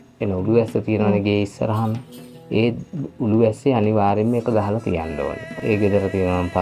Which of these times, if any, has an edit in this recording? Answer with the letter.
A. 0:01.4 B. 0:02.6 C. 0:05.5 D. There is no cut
C